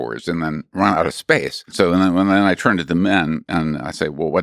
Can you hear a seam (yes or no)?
yes